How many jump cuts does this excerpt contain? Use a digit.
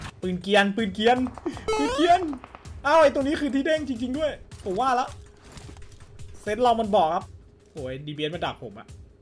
1